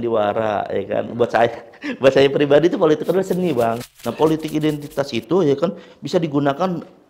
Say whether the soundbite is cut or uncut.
cut